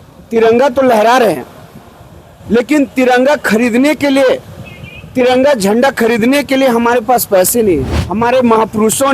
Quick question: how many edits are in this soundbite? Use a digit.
1